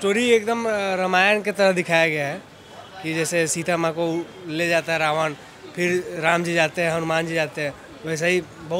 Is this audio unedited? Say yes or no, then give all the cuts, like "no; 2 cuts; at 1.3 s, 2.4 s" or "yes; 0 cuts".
yes; 0 cuts